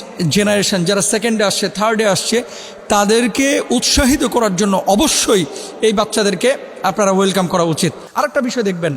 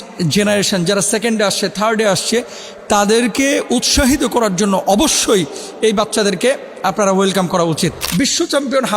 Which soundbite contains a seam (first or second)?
second